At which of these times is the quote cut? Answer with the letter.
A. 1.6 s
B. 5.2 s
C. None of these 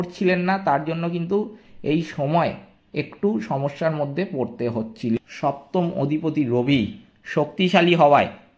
B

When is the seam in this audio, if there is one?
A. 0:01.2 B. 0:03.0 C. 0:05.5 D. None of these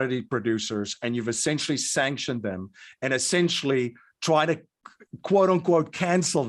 D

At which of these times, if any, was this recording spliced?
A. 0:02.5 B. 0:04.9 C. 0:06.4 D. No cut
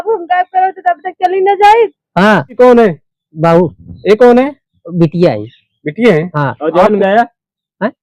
A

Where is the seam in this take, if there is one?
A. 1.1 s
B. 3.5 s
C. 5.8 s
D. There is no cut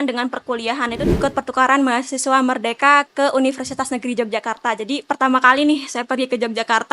A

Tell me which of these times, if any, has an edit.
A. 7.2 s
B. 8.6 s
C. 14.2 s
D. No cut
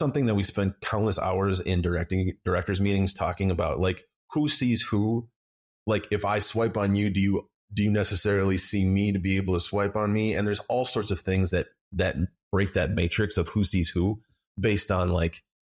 D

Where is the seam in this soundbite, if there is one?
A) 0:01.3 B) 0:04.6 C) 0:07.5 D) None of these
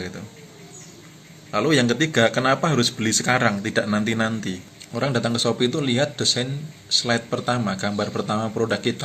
B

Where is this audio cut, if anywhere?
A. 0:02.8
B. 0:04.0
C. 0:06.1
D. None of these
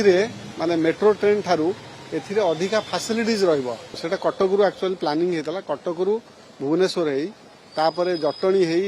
B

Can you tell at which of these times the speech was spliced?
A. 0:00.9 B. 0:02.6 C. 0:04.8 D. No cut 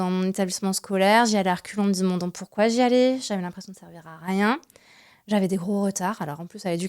D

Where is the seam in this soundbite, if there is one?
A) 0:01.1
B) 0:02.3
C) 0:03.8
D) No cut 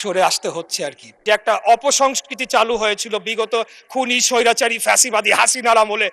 A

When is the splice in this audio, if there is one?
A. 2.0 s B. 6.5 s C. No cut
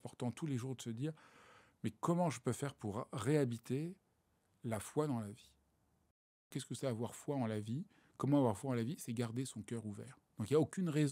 B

